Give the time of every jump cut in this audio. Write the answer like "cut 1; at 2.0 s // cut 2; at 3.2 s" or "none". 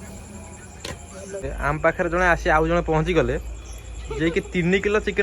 cut 1; at 1.5 s